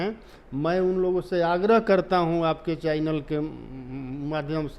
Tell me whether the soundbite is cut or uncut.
uncut